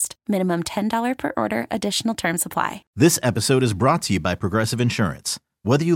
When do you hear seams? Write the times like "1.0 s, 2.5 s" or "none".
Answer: 2.8 s